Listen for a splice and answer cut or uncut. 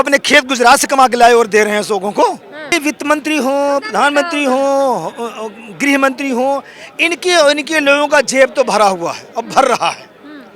cut